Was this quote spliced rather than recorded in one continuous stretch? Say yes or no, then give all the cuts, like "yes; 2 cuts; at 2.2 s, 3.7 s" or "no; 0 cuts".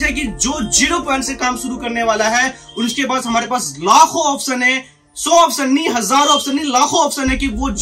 no; 0 cuts